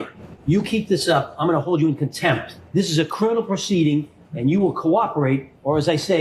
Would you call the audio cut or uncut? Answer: uncut